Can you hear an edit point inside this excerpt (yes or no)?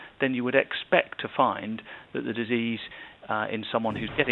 no